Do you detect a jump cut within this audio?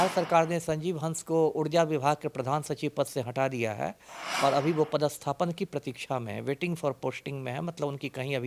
no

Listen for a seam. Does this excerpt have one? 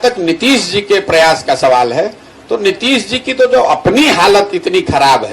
no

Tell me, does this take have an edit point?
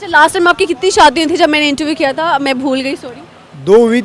no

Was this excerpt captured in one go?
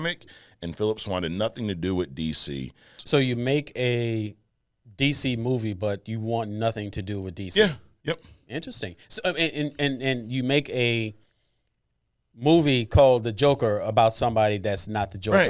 no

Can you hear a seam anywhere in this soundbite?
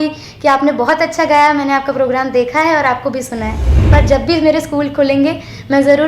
yes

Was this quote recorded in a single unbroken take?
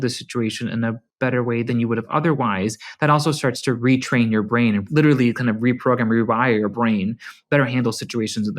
no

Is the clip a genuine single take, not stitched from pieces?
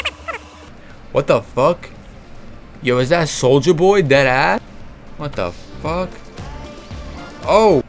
no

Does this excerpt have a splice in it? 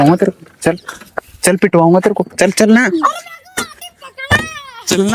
no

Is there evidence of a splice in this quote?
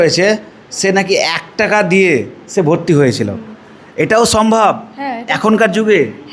no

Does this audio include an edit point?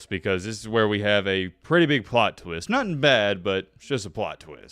no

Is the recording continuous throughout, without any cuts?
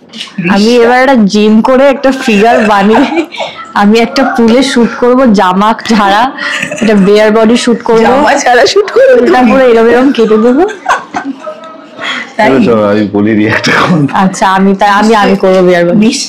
yes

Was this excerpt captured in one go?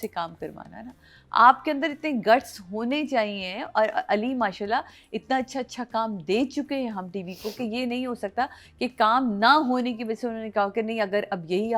yes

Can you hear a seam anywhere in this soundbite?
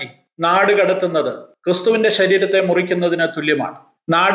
no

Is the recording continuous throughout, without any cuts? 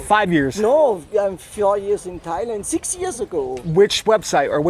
yes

